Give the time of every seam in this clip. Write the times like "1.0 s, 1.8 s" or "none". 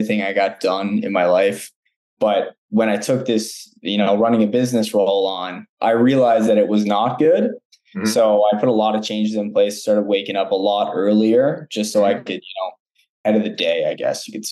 13.2 s